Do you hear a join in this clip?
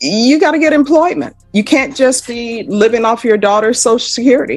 no; 0 cuts

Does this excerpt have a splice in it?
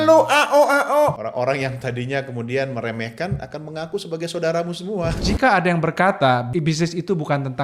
yes; 3 cuts; at 1.2 s, 5.1 s, 6.5 s

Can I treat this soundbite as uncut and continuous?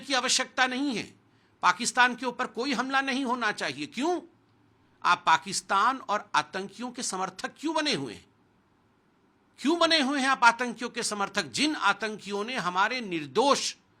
yes; 0 cuts

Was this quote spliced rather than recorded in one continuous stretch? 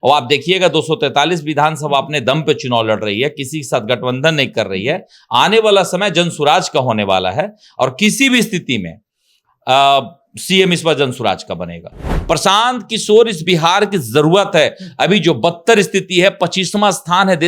yes; 1 cut; at 12.1 s

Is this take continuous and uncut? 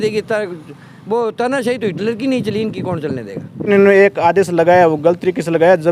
no; 1 cut; at 3.7 s

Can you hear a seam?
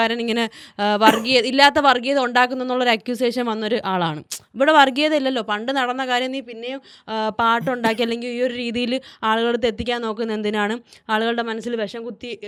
no; 0 cuts

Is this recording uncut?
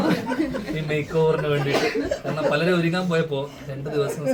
yes; 0 cuts

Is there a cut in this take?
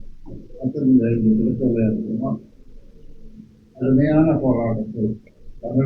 no; 0 cuts

